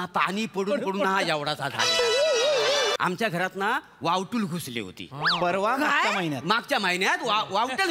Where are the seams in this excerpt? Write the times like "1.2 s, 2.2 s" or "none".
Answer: 2.9 s